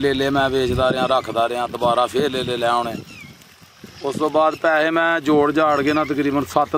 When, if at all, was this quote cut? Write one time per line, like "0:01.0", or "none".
none